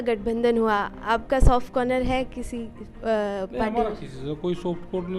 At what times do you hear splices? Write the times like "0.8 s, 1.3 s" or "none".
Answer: none